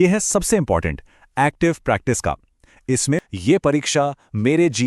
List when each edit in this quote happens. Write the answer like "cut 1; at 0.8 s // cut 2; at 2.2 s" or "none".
cut 1; at 3.2 s